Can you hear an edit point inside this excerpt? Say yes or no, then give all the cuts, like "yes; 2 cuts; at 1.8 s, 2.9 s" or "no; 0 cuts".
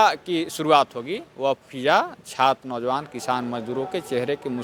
no; 0 cuts